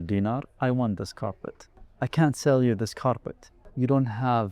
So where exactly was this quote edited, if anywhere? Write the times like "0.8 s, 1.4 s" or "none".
1.9 s, 3.6 s